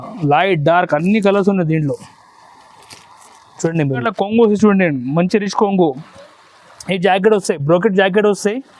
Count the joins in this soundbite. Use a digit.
1